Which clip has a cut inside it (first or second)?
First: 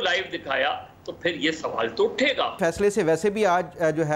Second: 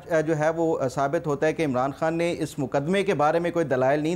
first